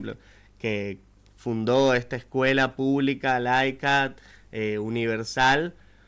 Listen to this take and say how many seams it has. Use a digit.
0